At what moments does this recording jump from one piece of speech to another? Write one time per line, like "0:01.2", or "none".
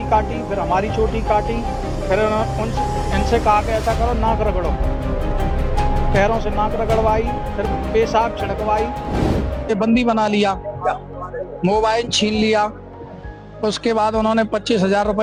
none